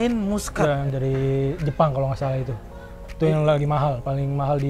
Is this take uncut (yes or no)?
no